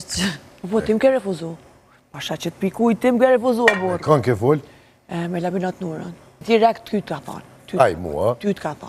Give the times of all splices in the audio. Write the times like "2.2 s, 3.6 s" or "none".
6.4 s